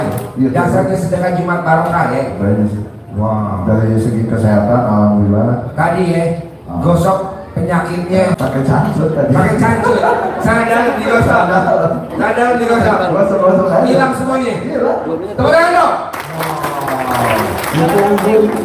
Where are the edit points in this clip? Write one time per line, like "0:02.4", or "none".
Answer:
0:08.3